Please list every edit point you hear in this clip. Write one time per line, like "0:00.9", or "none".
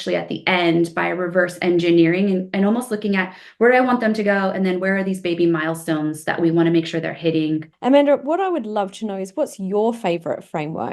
0:07.7